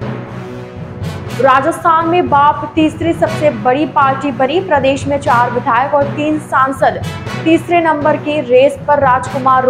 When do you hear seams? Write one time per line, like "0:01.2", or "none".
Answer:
0:01.4